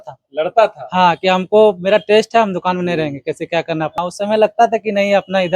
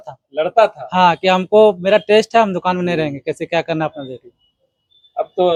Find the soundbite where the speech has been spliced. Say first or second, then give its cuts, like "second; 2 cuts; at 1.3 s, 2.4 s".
first; 1 cut; at 4.0 s